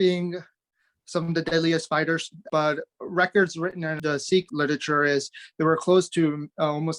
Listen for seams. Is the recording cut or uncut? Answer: cut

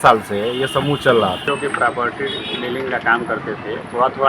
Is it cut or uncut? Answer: cut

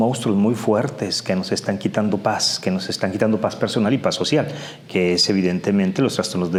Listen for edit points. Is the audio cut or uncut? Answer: uncut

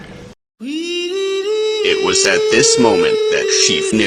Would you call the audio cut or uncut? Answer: uncut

